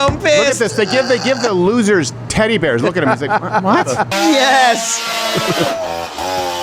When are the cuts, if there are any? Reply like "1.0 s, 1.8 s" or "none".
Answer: 4.1 s